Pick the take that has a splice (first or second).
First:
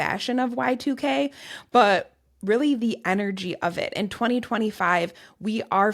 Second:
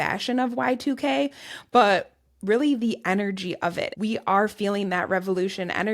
second